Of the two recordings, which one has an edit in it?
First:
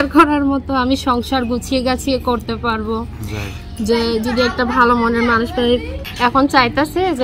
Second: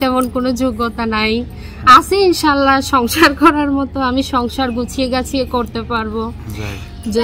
first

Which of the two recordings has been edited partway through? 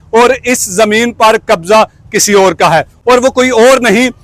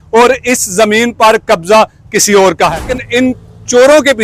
second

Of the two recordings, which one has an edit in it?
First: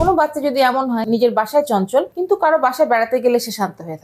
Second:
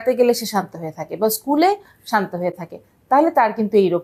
first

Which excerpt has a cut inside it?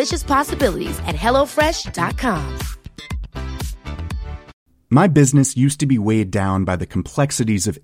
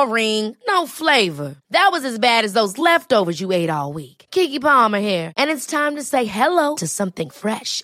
first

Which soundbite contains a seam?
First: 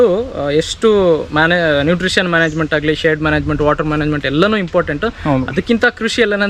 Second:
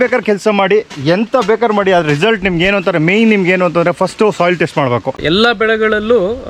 second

